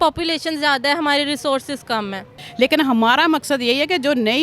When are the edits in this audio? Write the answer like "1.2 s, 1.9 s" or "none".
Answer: 2.4 s